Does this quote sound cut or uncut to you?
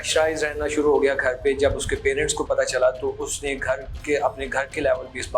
uncut